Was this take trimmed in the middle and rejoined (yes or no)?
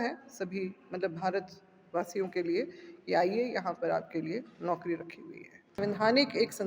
yes